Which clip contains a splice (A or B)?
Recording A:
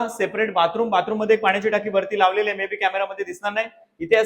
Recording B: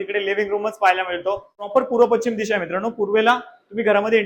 B